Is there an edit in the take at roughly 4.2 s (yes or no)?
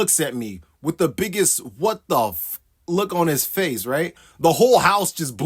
yes